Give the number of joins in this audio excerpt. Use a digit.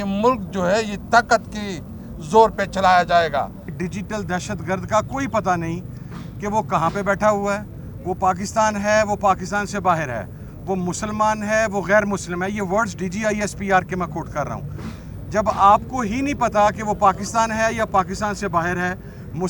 1